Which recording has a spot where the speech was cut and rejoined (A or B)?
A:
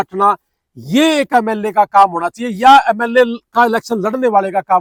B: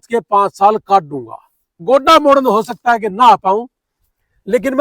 B